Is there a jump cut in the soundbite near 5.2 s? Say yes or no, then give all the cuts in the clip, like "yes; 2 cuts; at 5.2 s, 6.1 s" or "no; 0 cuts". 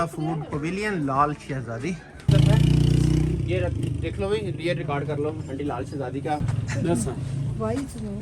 no; 2 cuts; at 2.3 s, 6.5 s